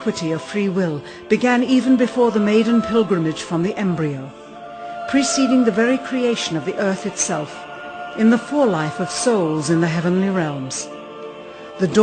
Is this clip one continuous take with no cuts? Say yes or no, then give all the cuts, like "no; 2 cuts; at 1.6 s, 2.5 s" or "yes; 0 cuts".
no; 1 cut; at 9.0 s